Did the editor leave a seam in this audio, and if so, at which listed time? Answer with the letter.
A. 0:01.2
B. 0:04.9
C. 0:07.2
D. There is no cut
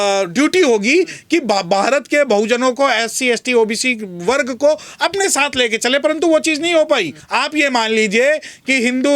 C